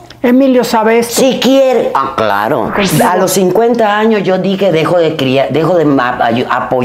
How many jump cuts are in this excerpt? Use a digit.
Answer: 1